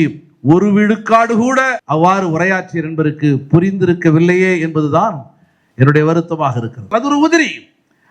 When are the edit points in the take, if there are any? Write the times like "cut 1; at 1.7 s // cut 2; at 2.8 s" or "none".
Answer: cut 1; at 1.8 s // cut 2; at 6.8 s